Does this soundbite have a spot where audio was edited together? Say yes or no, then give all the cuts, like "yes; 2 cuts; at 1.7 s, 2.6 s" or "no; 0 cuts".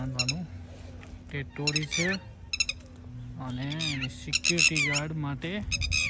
no; 0 cuts